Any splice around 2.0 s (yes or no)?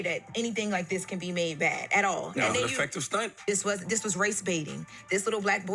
no